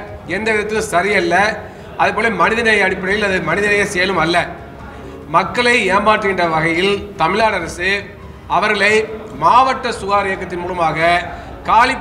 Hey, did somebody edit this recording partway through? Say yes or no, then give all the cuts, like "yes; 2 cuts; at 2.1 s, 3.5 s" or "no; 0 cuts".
yes; 1 cut; at 5.0 s